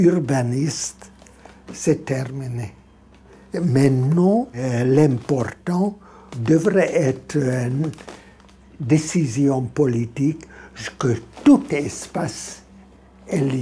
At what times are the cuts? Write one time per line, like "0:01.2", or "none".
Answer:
0:03.4
0:04.6
0:06.4